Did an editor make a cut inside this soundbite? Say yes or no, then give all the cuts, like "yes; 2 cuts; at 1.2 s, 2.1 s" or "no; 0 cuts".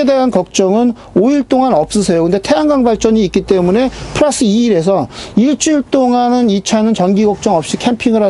no; 0 cuts